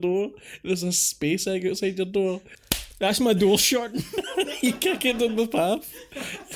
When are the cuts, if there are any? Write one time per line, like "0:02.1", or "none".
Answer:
none